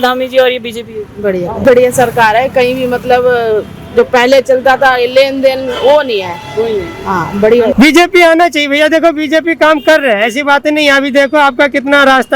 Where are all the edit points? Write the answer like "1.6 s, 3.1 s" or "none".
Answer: 1.6 s, 7.7 s